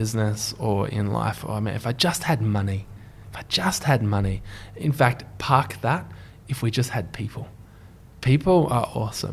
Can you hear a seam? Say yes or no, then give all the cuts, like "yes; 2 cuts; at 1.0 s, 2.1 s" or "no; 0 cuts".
no; 0 cuts